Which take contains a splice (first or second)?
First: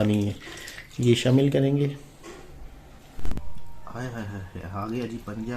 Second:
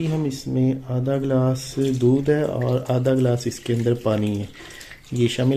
first